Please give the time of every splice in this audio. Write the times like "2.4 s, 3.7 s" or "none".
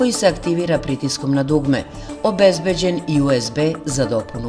none